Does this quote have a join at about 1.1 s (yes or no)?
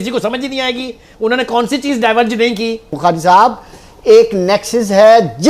no